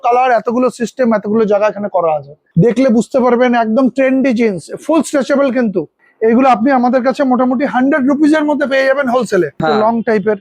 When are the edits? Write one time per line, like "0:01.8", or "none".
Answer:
0:02.4
0:06.0
0:09.6

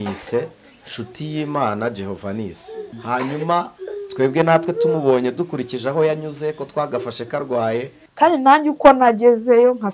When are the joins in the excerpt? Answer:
0:03.0
0:08.0

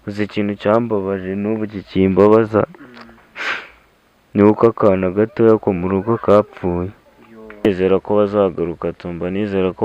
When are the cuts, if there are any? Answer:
0:07.7

